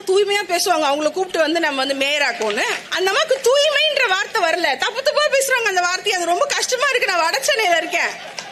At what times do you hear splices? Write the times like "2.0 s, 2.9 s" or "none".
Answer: 2.8 s